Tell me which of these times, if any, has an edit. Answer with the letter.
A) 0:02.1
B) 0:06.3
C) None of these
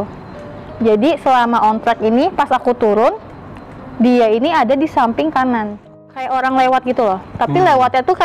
B